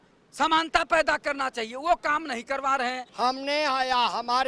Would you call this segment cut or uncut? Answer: cut